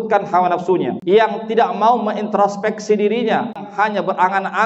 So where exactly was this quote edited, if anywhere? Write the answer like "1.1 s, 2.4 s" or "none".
1.0 s, 3.6 s